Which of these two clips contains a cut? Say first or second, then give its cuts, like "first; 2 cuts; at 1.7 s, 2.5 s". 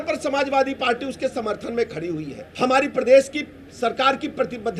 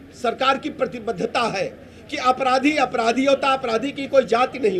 first; 1 cut; at 2.4 s